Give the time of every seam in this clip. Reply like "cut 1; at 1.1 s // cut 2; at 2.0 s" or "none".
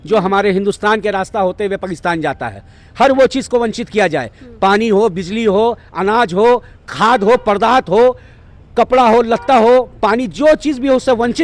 none